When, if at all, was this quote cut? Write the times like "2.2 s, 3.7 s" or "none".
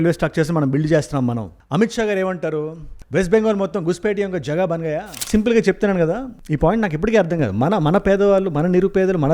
5.2 s